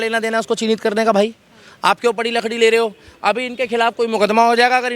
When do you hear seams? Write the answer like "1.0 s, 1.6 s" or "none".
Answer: none